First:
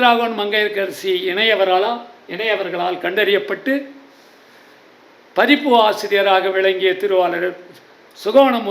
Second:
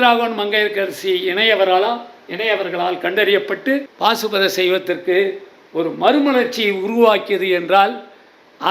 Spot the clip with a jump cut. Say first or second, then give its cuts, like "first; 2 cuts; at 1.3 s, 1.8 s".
second; 1 cut; at 3.9 s